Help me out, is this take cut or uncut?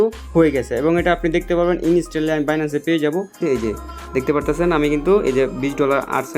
cut